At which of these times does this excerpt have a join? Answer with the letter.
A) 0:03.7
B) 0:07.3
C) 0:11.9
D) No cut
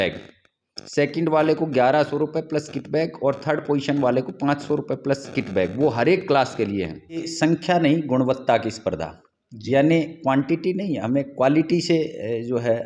B